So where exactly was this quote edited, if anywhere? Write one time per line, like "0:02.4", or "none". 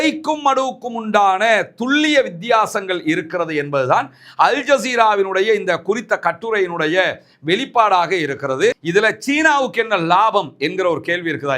0:08.8